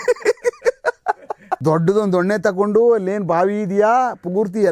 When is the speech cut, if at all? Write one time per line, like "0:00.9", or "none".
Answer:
0:01.4